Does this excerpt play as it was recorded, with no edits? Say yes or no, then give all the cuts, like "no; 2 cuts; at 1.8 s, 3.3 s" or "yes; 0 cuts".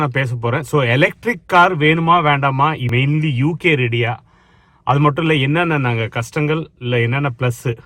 no; 1 cut; at 2.8 s